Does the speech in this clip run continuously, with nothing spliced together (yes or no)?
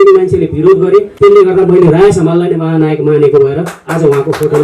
no